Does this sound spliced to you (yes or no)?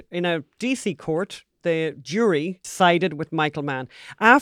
yes